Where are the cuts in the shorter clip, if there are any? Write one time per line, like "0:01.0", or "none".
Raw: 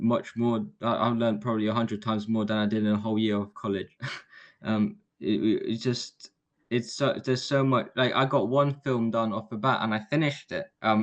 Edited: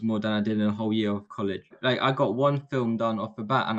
0:01.8